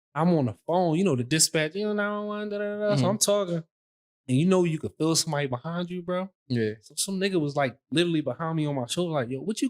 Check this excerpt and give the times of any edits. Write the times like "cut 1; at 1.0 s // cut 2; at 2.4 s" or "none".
none